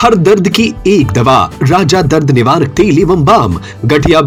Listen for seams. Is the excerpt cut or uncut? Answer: uncut